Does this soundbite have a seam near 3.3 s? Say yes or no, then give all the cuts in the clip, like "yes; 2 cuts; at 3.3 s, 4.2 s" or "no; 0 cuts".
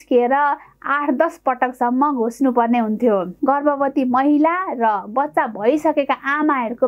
yes; 1 cut; at 3.3 s